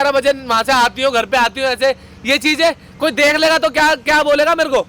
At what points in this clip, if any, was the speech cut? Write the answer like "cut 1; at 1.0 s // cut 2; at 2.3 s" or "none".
none